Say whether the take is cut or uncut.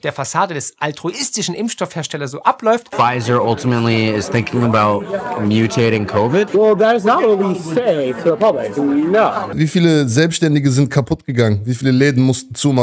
cut